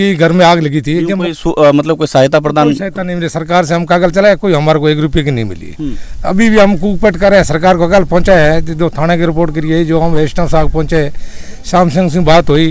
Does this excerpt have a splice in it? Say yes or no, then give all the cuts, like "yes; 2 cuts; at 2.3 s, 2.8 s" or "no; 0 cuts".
no; 0 cuts